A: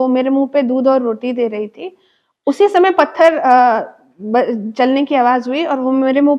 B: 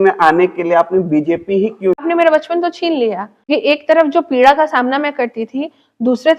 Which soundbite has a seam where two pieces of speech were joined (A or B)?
B